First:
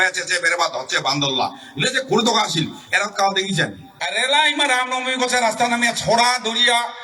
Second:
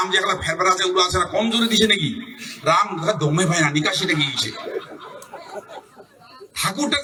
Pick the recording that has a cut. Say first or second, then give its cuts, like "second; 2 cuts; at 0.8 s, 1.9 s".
first; 1 cut; at 3.8 s